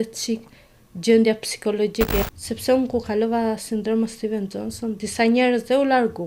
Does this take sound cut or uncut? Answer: cut